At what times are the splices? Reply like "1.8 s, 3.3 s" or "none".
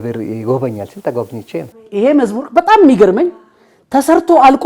1.8 s

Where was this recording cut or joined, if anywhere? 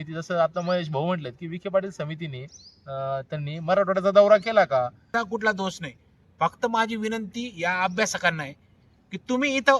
5.0 s

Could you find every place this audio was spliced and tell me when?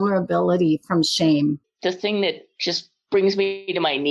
1.6 s

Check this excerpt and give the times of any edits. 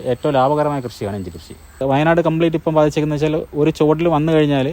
1.8 s

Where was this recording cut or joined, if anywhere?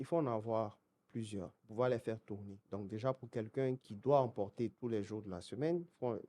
1.6 s, 2.6 s, 3.9 s, 4.8 s

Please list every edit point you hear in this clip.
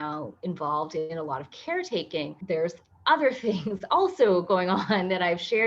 none

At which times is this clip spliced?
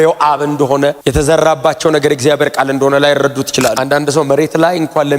1.0 s, 3.8 s

